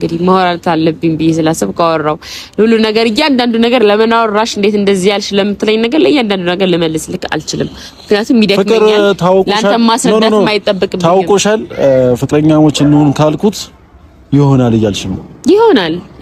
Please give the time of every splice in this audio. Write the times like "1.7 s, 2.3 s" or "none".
none